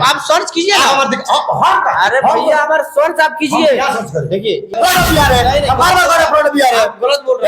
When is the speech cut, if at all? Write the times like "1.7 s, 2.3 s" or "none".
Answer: 4.7 s